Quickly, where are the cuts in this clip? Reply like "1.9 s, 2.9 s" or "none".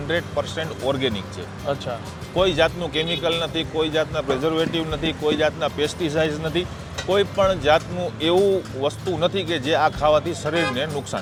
none